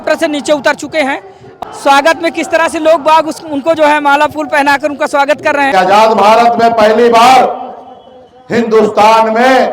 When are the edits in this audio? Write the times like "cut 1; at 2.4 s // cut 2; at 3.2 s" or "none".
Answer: cut 1; at 1.4 s // cut 2; at 5.7 s